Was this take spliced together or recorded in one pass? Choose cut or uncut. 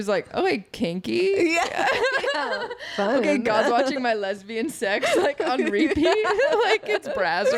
uncut